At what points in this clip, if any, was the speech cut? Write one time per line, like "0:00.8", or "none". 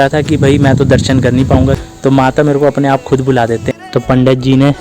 0:01.8
0:03.7